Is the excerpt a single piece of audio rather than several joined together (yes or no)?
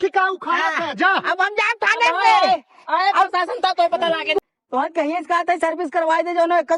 no